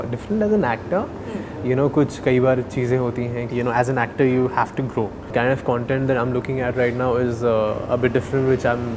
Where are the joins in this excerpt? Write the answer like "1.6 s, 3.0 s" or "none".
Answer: 3.4 s, 5.3 s